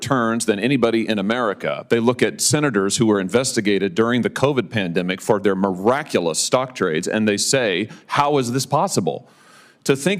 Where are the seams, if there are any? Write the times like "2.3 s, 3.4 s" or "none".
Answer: none